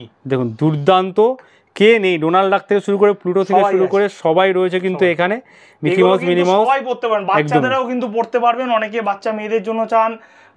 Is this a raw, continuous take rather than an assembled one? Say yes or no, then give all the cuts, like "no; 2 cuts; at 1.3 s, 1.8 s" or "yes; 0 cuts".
yes; 0 cuts